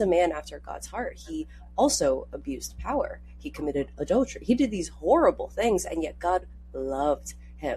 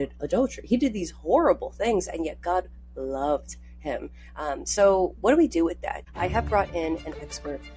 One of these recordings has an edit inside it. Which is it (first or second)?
second